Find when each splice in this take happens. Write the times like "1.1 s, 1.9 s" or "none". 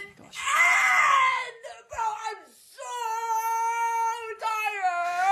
none